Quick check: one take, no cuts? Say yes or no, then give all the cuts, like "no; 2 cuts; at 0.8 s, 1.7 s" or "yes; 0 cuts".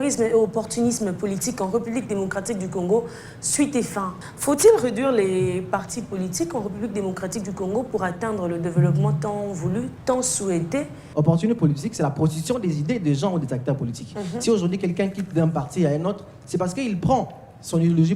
no; 2 cuts; at 4.2 s, 11.0 s